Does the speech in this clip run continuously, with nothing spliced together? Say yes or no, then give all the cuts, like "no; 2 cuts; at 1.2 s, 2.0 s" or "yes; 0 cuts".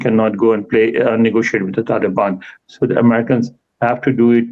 yes; 0 cuts